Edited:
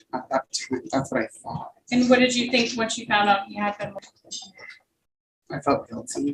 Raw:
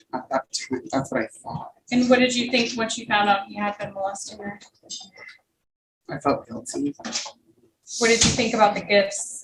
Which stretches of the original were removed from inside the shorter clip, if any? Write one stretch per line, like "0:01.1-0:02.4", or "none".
0:04.0-0:04.6